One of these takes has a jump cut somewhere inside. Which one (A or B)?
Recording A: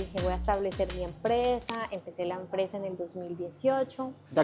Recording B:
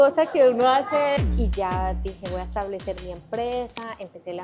B